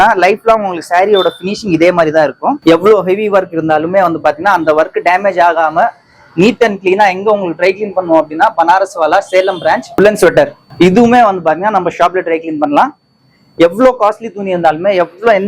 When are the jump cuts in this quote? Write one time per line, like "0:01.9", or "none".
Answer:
0:02.6
0:09.9